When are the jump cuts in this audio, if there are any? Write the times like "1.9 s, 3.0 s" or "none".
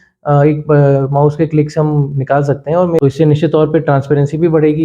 3.0 s

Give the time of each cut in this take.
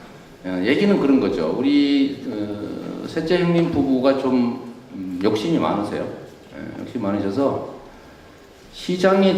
none

